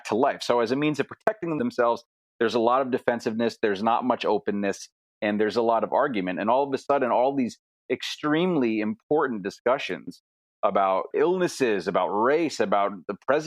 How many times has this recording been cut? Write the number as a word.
two